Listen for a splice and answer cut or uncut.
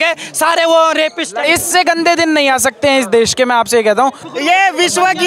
cut